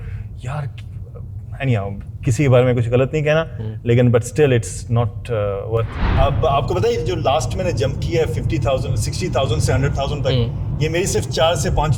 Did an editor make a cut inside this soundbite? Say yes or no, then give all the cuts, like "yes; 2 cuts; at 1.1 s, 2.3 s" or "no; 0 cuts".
yes; 1 cut; at 6.0 s